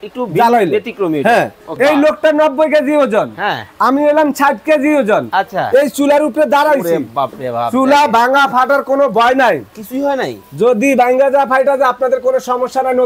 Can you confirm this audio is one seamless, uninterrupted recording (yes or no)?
no